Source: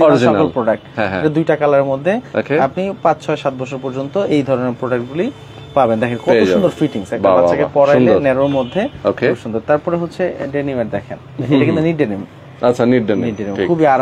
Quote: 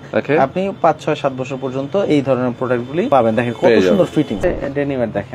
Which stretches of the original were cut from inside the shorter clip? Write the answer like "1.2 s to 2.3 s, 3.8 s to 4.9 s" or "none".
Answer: 5.3 s to 5.7 s, 7.0 s to 10.1 s